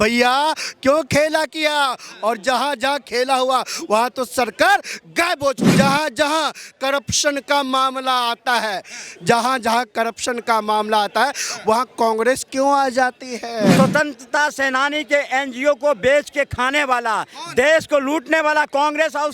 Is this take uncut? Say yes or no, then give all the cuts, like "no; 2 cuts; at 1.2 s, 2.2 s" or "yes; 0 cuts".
no; 2 cuts; at 5.6 s, 13.8 s